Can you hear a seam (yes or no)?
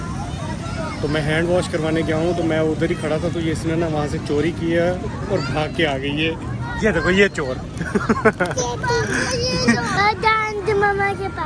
yes